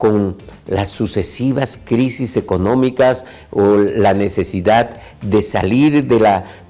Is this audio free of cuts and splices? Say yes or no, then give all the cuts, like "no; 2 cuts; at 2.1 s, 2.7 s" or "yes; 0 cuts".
yes; 0 cuts